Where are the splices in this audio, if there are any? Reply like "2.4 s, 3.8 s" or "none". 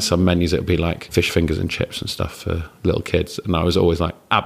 1.1 s

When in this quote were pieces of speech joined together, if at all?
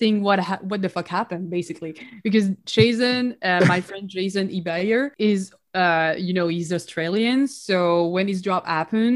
5.1 s

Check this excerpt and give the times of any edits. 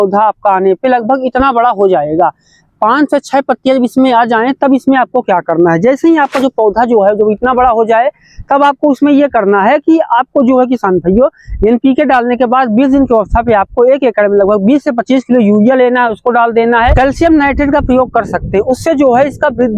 none

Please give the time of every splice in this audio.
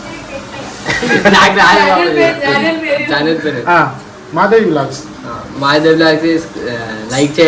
none

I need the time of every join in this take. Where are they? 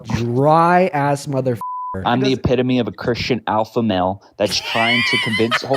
2.0 s

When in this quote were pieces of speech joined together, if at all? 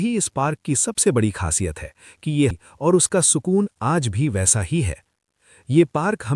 2.6 s

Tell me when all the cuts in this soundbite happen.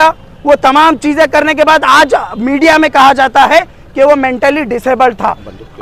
none

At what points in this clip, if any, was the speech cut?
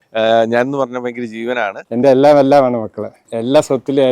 1.8 s

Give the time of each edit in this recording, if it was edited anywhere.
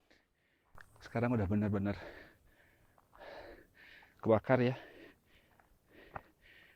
none

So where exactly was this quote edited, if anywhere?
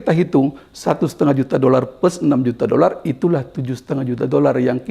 none

